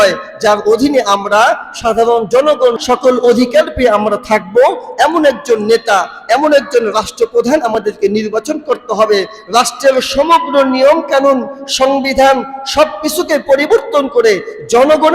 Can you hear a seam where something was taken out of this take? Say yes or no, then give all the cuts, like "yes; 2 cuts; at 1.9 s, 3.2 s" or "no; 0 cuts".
yes; 1 cut; at 2.8 s